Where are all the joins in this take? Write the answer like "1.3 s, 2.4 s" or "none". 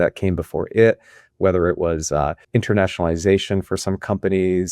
2.4 s